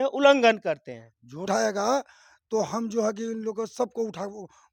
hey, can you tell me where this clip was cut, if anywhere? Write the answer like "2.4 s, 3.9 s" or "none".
1.4 s